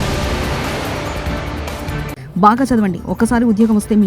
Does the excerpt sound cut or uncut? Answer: cut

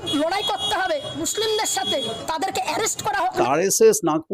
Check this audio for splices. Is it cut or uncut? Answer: cut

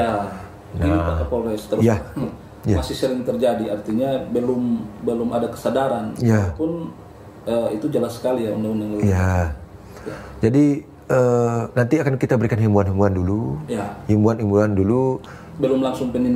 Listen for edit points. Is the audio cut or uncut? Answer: uncut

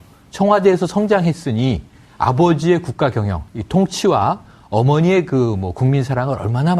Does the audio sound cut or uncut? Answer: uncut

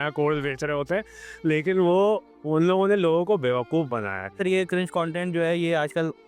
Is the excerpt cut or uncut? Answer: cut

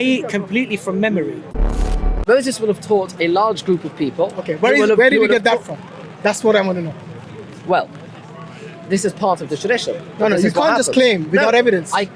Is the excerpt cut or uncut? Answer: cut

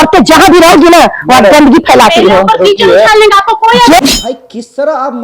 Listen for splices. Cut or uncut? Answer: cut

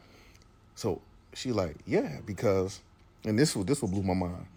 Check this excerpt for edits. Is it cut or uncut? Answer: uncut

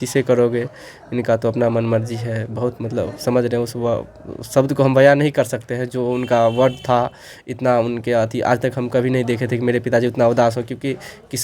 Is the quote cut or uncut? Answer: uncut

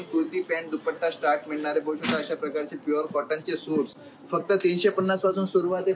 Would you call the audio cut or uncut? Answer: uncut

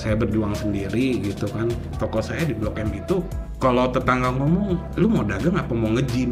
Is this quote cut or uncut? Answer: cut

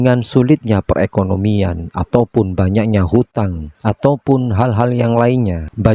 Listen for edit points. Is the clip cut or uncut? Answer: uncut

